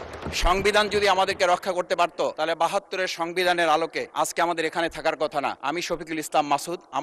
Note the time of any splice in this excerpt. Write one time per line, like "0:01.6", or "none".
0:02.3
0:04.0
0:05.6